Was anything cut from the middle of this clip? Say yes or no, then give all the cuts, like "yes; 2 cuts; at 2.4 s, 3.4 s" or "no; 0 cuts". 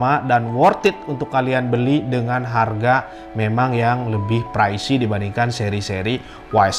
no; 0 cuts